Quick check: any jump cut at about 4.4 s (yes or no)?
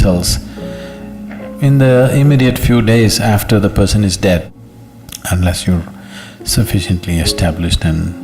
yes